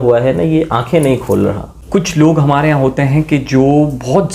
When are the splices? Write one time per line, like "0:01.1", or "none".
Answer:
0:01.7